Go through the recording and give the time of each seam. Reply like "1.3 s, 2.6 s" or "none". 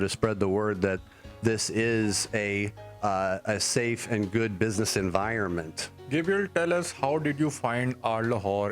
none